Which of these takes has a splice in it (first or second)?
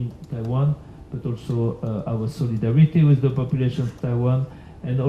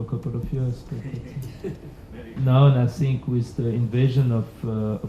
second